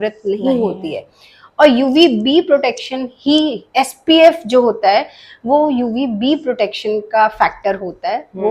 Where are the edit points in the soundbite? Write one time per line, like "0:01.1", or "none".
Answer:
none

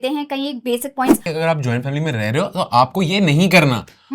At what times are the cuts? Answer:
0:01.3

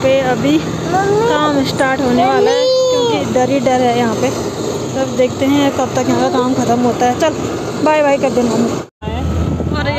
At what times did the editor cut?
0:09.0

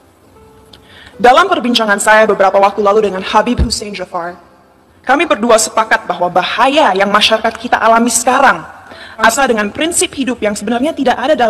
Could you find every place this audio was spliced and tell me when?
0:09.3

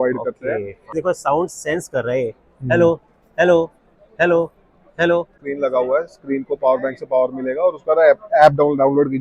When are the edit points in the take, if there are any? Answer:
0:00.9
0:05.4

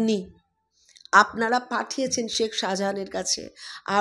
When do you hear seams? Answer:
none

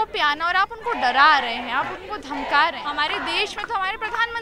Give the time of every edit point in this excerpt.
0:02.8

